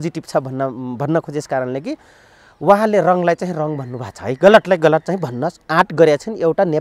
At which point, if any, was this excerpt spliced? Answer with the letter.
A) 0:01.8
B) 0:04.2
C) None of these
C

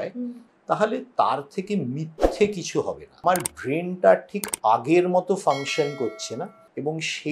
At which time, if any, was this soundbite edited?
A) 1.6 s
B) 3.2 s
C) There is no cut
B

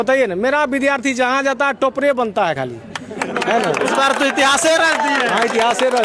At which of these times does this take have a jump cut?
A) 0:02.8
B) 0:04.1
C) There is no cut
C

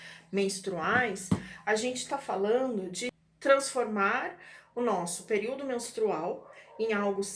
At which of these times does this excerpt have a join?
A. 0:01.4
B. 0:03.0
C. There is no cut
B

